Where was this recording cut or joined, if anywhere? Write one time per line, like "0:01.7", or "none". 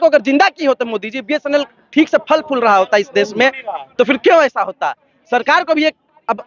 none